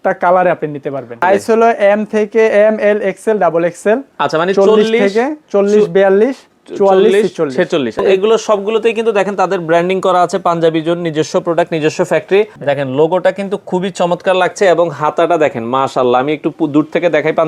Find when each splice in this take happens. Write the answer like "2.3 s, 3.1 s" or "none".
1.2 s, 8.0 s, 12.6 s